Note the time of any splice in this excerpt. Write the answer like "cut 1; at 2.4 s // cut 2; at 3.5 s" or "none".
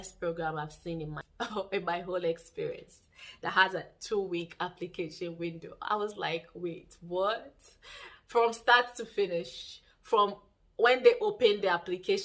none